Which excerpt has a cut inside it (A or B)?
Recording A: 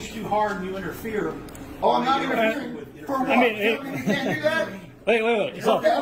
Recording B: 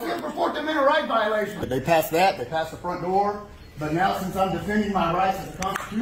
B